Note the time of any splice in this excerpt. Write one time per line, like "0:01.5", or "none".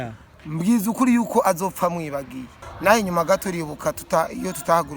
0:02.7